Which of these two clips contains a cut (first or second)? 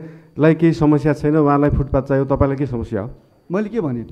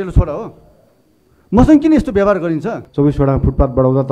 second